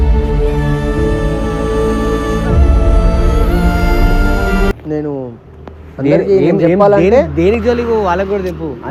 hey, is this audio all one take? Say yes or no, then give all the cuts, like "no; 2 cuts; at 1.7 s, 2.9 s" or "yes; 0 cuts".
yes; 0 cuts